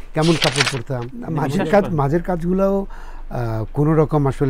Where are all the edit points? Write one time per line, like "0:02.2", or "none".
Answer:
0:01.1